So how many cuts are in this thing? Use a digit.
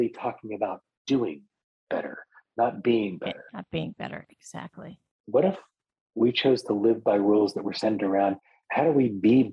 1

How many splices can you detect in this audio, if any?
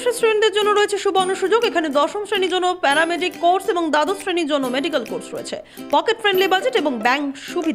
0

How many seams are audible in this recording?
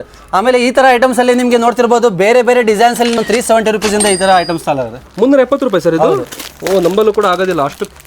1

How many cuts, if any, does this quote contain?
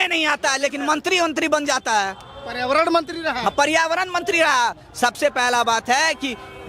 0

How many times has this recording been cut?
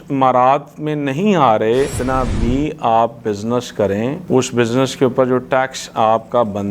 1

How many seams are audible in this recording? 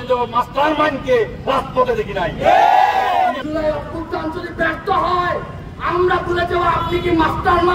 1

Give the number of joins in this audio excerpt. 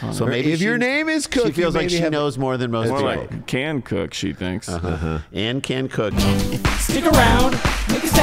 1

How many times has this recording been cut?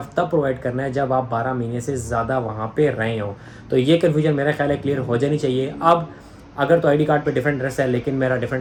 0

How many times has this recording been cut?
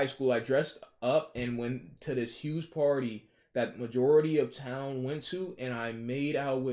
0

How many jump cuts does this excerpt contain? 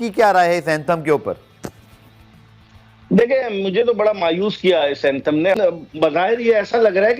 1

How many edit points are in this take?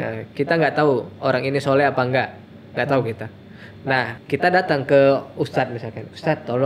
1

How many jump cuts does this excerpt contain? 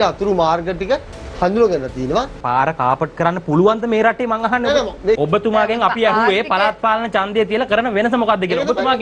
2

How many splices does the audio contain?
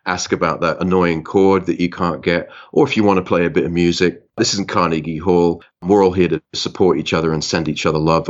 0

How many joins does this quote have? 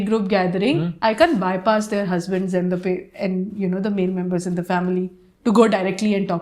1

